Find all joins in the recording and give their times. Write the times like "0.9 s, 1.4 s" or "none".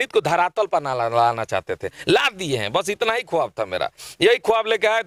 none